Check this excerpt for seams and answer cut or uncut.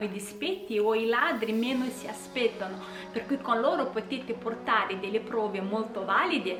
uncut